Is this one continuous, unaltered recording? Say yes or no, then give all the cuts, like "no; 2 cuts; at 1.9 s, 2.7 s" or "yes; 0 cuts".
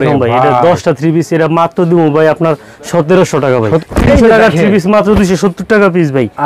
no; 1 cut; at 3.8 s